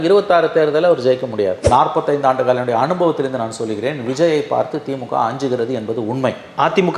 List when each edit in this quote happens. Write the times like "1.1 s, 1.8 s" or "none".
1.6 s